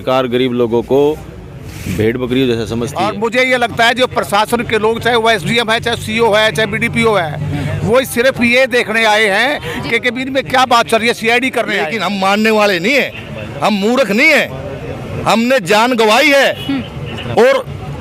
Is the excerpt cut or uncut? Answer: cut